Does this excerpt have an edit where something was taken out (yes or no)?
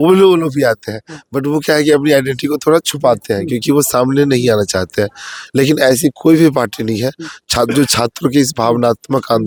no